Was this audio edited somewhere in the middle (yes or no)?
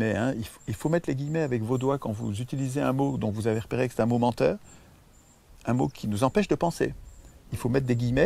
no